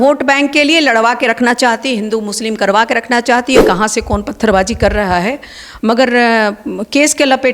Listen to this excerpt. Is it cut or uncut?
cut